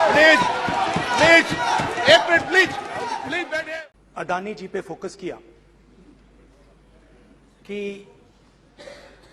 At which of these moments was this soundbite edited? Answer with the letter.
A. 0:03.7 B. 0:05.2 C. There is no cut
A